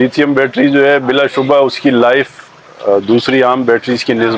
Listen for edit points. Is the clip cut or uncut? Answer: uncut